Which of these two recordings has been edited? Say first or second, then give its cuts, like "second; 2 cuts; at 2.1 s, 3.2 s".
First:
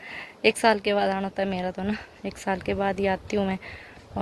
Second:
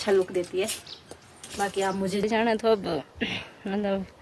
second; 1 cut; at 2.2 s